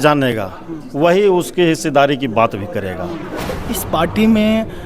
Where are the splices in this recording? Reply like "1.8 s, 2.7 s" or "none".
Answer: 3.5 s